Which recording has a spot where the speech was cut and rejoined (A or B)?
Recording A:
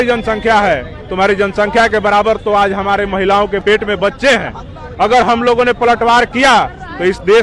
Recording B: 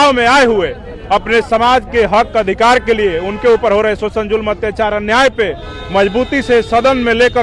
A